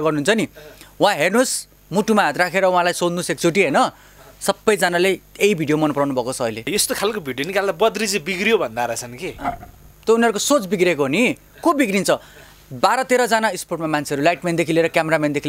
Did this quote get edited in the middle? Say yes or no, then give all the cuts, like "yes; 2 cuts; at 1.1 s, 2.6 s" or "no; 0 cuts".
yes; 1 cut; at 6.7 s